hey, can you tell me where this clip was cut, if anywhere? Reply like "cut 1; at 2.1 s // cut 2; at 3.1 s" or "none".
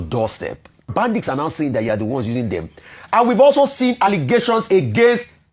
cut 1; at 0.9 s